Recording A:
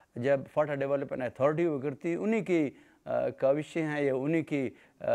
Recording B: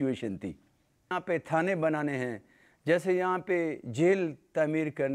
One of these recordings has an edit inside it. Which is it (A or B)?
B